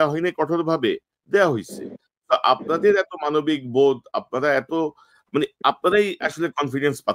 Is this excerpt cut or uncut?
uncut